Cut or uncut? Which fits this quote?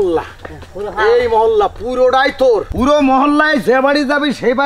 cut